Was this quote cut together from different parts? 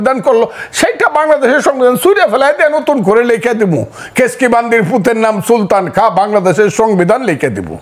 no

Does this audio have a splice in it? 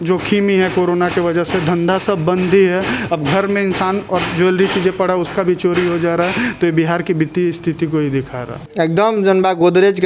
yes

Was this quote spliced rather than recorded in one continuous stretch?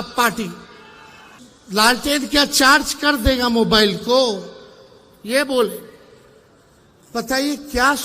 yes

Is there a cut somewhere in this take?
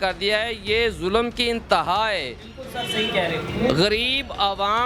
no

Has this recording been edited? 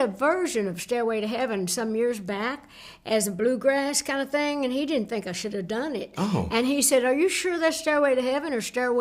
no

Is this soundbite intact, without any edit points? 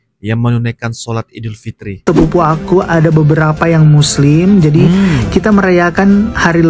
no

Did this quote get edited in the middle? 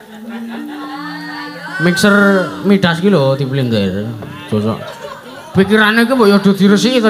no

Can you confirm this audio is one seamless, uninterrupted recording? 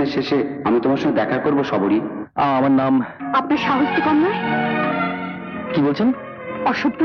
yes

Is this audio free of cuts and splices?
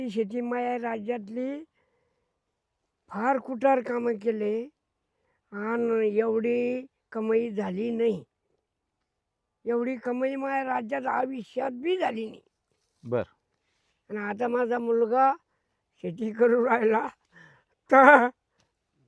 yes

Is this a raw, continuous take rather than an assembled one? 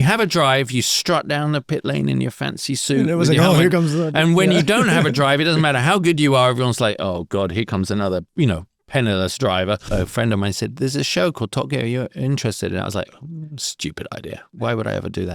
no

